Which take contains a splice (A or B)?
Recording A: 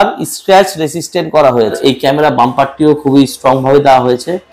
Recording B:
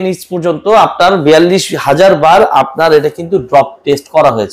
A